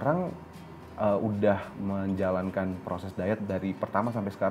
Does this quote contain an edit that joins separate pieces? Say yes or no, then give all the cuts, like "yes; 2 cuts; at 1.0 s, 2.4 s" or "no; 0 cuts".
no; 0 cuts